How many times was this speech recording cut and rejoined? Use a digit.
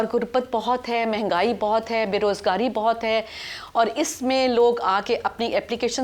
0